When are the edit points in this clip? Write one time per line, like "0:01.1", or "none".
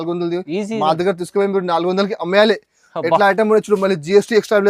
none